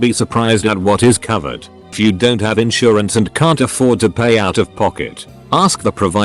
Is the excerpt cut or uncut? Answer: cut